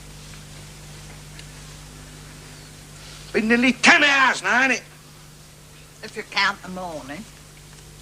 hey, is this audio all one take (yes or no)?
no